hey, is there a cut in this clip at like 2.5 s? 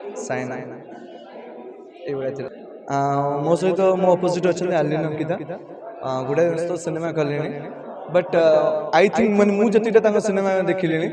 yes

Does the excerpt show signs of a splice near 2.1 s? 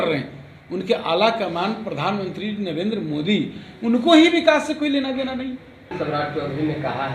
no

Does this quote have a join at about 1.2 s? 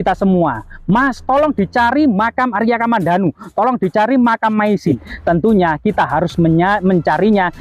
no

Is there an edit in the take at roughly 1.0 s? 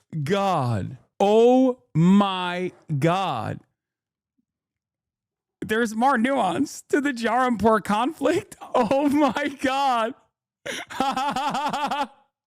yes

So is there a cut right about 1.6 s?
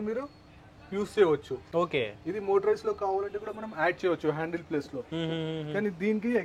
no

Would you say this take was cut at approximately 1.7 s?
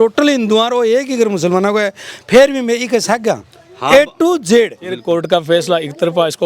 no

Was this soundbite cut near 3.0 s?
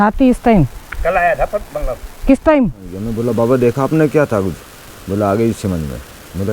yes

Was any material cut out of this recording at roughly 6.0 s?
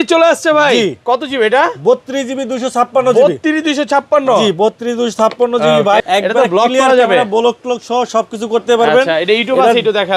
yes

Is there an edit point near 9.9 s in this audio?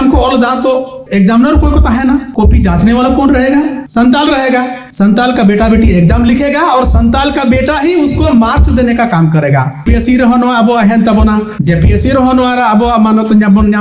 yes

